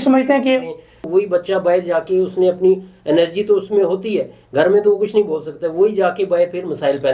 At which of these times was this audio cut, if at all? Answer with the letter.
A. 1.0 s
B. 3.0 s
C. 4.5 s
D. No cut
A